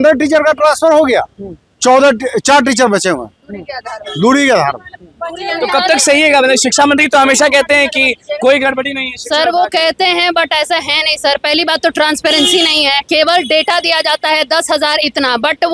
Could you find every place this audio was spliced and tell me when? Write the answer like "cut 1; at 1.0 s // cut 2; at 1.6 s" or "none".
none